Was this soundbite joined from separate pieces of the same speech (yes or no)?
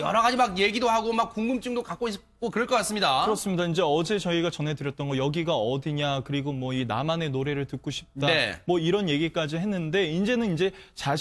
yes